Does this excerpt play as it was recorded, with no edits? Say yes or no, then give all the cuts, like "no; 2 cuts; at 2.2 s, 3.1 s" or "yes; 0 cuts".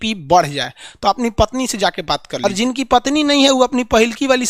no; 1 cut; at 2.4 s